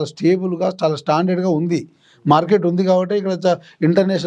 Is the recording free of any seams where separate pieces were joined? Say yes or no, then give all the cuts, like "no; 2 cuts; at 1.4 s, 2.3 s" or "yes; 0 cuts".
yes; 0 cuts